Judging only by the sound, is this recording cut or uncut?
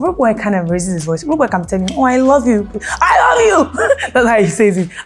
uncut